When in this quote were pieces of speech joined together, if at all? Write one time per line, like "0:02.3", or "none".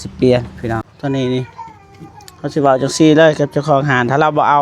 0:00.9